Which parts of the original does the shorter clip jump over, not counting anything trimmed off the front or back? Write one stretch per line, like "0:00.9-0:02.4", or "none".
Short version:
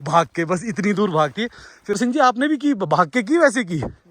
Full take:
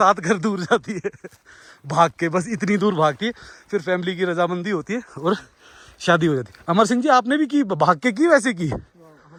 0:03.8-0:06.9